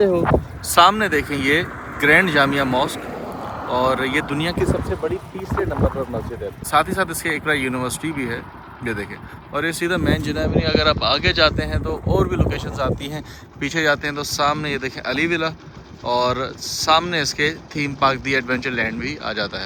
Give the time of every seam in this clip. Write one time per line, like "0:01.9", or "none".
none

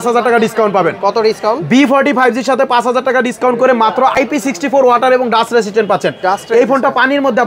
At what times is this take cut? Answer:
0:04.1

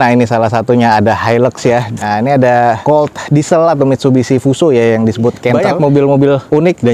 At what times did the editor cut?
0:02.0
0:05.5

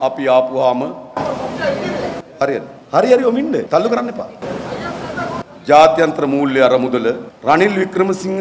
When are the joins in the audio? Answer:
0:02.8
0:03.7
0:04.4
0:07.3

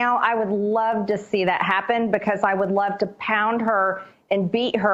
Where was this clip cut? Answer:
none

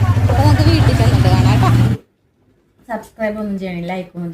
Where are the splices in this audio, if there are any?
0:01.9

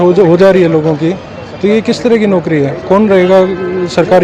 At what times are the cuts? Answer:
none

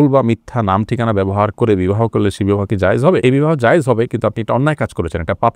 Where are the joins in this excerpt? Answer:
none

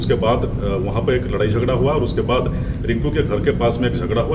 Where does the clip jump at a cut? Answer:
none

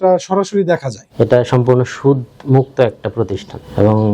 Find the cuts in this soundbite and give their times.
0:01.1

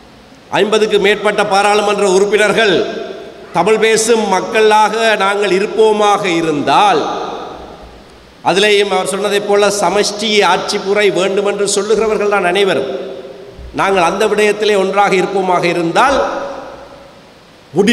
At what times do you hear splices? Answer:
none

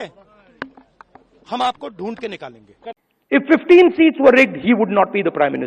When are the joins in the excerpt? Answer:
0:03.1

